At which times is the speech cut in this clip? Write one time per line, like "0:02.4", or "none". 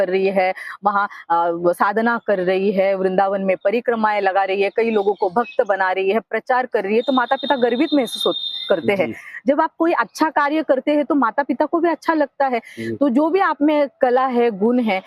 none